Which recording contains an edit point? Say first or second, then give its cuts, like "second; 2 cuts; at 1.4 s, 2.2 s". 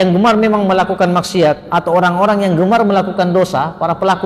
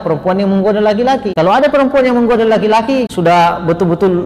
second; 2 cuts; at 1.3 s, 3.1 s